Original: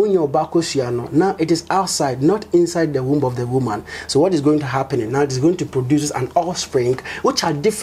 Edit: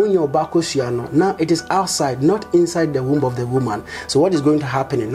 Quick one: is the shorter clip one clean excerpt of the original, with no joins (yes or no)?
yes